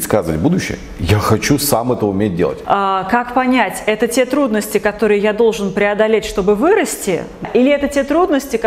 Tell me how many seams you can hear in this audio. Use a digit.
2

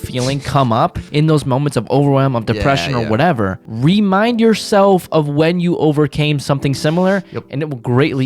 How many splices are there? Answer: 2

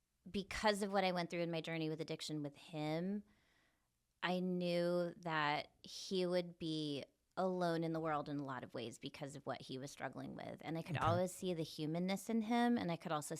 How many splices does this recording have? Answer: 0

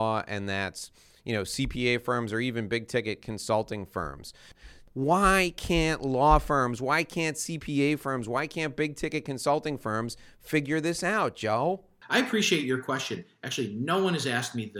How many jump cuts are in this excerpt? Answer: 2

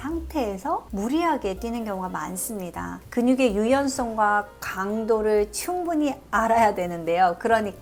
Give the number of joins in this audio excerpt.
0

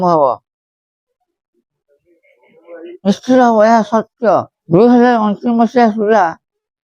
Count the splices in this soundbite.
1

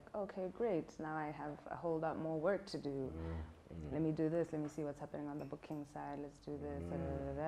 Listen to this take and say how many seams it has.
0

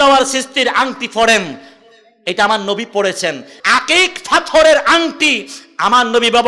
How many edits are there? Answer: 1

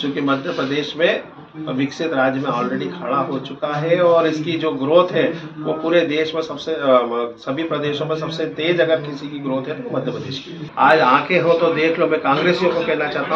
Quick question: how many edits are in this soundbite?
1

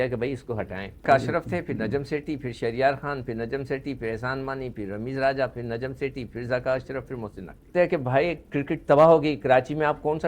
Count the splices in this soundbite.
2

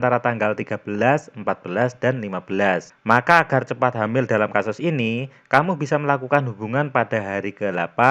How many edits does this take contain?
1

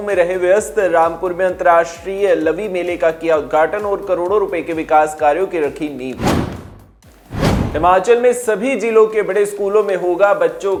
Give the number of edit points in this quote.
0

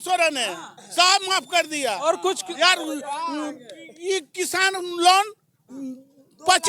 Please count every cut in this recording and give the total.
0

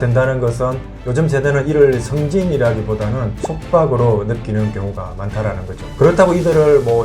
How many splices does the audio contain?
1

